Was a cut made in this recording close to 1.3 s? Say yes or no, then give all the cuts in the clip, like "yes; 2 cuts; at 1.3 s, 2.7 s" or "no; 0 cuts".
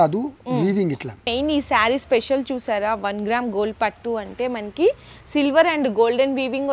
yes; 1 cut; at 1.3 s